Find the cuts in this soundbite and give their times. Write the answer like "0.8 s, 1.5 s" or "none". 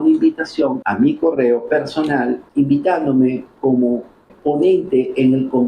0.8 s, 2.4 s, 4.3 s